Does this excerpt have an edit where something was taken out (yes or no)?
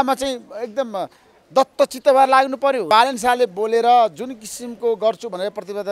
yes